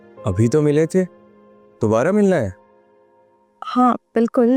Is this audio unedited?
yes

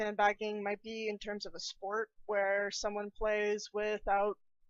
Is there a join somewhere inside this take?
no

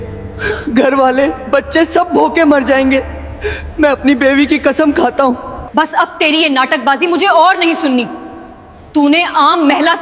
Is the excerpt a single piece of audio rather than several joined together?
no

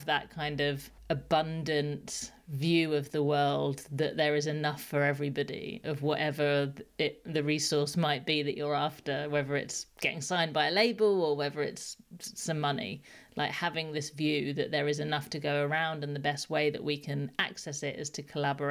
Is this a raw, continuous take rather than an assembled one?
no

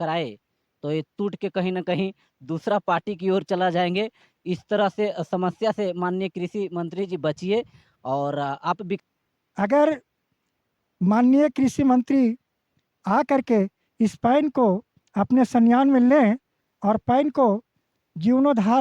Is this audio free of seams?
no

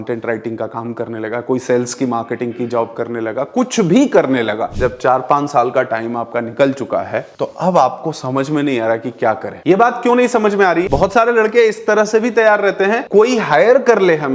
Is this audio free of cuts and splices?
no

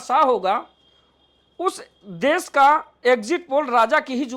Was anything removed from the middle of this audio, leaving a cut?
no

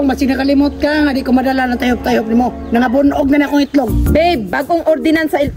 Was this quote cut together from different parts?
yes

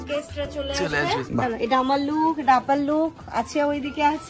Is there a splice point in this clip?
yes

